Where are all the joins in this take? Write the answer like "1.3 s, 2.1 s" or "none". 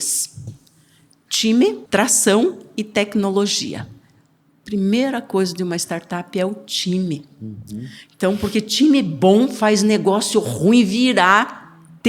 1.8 s